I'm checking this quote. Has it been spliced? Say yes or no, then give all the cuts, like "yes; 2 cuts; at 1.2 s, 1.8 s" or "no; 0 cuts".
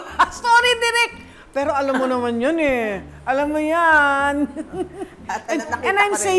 no; 0 cuts